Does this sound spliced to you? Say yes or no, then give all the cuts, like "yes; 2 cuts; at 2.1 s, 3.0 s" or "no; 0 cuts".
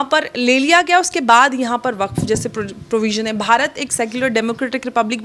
no; 0 cuts